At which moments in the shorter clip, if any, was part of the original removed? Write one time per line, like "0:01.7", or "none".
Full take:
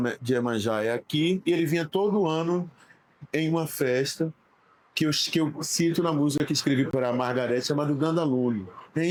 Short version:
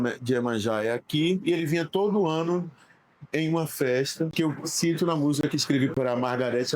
0:04.3